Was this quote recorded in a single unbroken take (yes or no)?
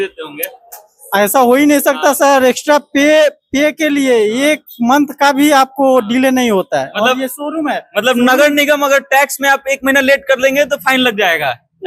yes